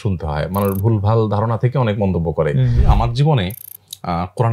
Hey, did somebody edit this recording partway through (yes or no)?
yes